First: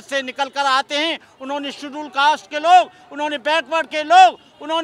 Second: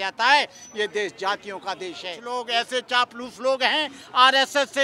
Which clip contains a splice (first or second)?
second